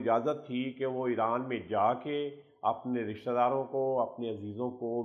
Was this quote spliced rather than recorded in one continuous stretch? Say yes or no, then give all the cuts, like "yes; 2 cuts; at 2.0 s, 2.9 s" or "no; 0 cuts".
no; 0 cuts